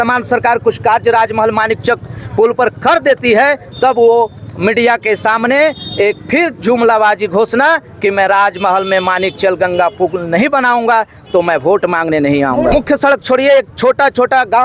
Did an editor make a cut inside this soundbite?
yes; 1 cut; at 12.7 s

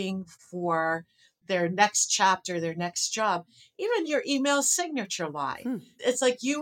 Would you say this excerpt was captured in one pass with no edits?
yes; 0 cuts

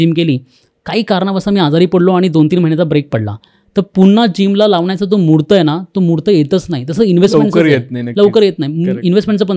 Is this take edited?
no; 0 cuts

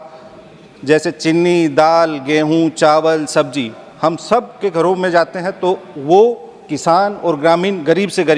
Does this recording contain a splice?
no; 0 cuts

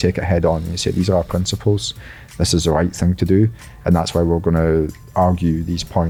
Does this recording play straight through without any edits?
yes; 0 cuts

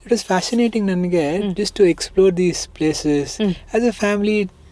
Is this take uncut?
yes; 0 cuts

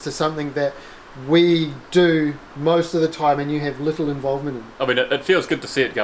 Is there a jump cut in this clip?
no; 0 cuts

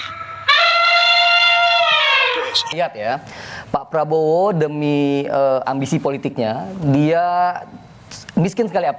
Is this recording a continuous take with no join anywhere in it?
no; 1 cut; at 2.7 s

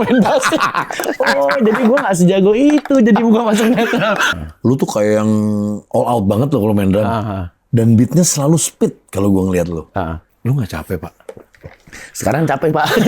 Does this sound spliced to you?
yes; 2 cuts; at 4.3 s, 10.3 s

